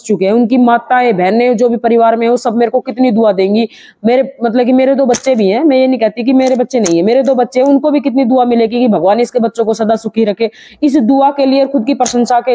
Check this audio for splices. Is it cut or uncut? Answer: uncut